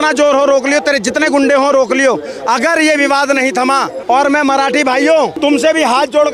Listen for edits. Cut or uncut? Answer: cut